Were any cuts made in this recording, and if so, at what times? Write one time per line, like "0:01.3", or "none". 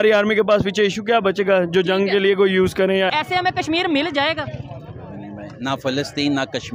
0:03.1